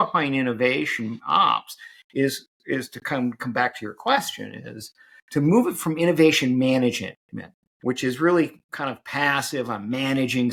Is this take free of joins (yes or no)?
yes